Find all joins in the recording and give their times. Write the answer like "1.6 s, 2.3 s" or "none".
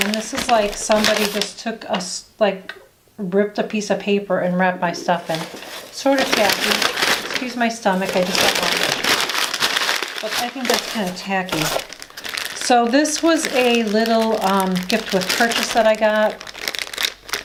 none